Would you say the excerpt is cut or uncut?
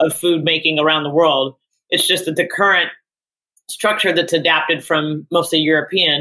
uncut